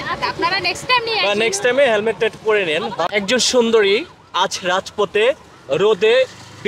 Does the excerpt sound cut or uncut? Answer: cut